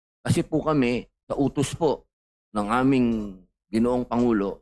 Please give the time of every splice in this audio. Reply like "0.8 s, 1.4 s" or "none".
1.1 s